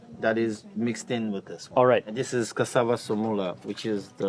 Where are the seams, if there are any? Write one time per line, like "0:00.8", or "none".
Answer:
0:02.1